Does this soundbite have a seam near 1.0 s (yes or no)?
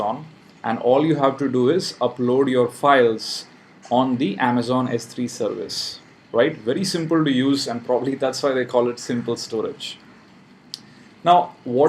no